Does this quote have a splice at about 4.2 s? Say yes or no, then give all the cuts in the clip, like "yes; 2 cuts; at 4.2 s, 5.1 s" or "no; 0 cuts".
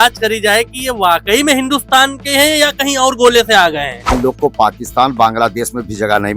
yes; 1 cut; at 4.2 s